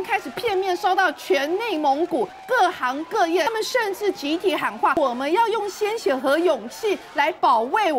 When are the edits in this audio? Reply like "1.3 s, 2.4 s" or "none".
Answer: 2.4 s, 3.5 s, 5.0 s